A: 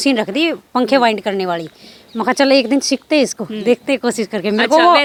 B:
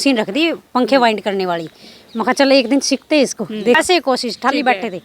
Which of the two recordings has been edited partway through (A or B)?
B